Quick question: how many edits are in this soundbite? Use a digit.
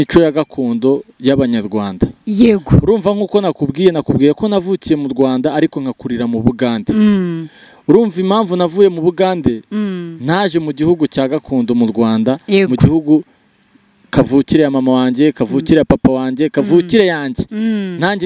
0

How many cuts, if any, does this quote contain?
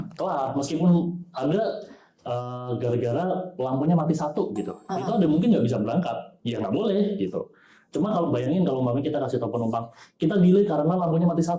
0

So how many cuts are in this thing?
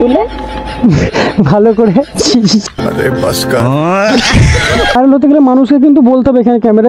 1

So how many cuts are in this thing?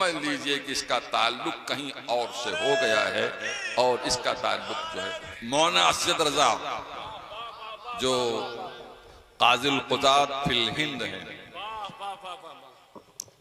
0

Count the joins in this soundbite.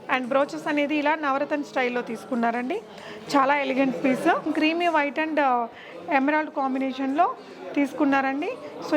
1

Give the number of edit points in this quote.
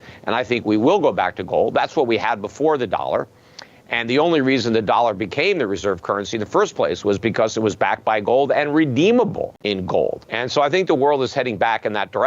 2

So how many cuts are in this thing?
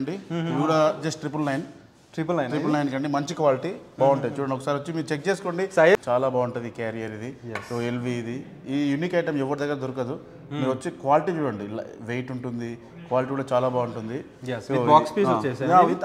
1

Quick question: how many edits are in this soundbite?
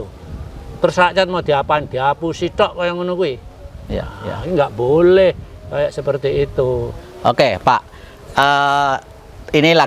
0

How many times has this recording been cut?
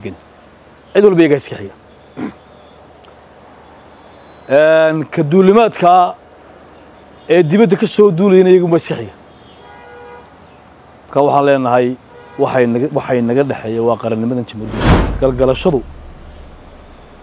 1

